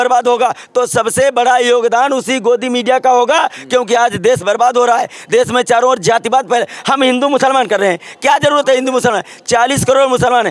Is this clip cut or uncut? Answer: uncut